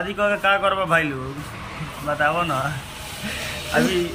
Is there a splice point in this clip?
no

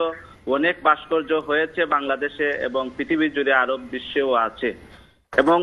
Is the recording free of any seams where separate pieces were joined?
yes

